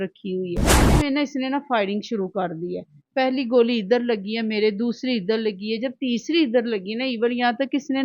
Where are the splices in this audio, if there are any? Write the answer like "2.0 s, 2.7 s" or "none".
1.0 s